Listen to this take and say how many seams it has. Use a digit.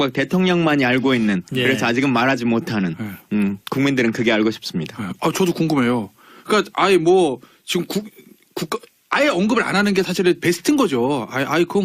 1